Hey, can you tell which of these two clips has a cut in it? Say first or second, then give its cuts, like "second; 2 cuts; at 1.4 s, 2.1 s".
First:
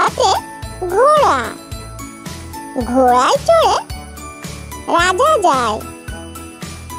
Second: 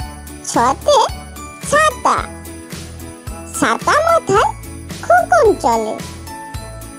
first; 1 cut; at 5.8 s